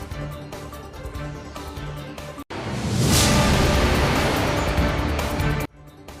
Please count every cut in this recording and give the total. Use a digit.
0